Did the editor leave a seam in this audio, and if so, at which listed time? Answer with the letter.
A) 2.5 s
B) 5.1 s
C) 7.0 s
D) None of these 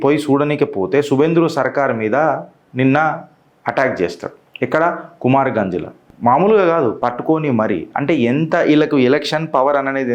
C